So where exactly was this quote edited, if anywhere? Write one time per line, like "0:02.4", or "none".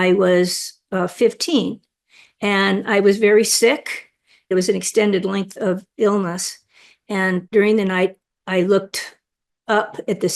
0:04.5
0:07.5